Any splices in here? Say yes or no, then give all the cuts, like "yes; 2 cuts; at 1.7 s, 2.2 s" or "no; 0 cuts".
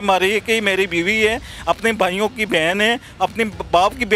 no; 0 cuts